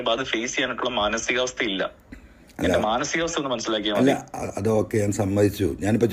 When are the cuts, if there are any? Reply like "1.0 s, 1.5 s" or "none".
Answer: none